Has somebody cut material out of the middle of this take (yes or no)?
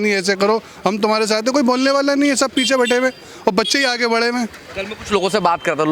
no